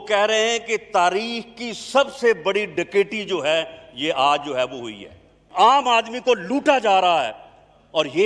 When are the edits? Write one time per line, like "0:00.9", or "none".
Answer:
0:05.4